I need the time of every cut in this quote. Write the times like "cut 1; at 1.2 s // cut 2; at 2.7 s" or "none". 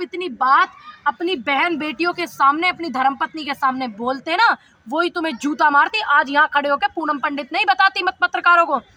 none

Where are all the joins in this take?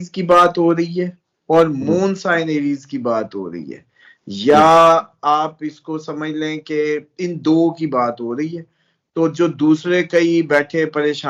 none

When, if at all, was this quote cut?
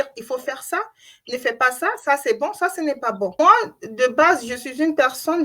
cut 1; at 3.3 s

